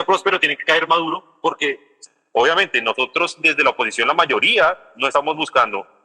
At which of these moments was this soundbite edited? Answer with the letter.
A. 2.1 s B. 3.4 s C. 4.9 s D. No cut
A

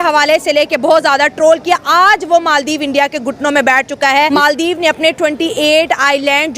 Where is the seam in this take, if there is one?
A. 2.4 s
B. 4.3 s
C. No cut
B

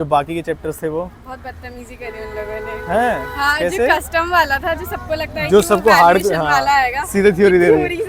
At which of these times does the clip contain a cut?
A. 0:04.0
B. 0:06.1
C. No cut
C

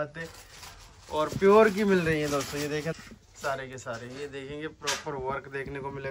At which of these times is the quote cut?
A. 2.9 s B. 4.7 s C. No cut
A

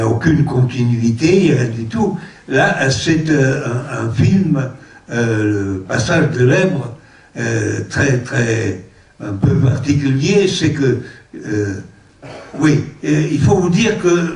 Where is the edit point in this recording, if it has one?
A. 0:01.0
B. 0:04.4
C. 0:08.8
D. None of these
B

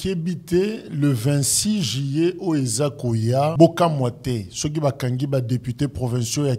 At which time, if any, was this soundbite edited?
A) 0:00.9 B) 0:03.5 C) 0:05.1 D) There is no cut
B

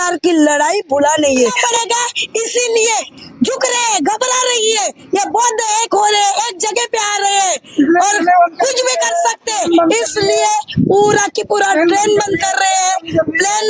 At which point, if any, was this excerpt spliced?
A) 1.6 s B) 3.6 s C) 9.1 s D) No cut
A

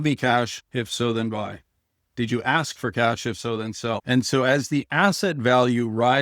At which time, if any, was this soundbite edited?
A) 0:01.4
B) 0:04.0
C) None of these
B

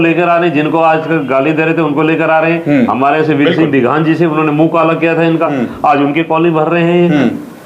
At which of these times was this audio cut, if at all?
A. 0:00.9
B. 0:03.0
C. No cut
C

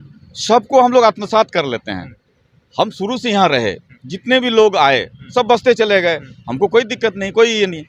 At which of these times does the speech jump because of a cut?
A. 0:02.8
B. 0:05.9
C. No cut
C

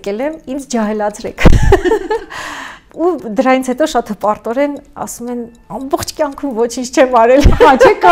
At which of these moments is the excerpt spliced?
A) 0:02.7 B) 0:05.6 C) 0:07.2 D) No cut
A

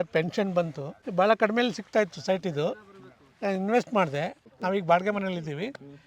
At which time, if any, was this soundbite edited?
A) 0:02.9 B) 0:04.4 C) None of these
B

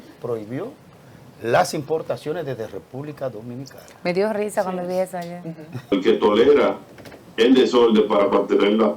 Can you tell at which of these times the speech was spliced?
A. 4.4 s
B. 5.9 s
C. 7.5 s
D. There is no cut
B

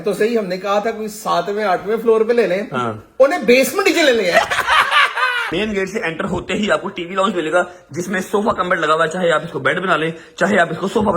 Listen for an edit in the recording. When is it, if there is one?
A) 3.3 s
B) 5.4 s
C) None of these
B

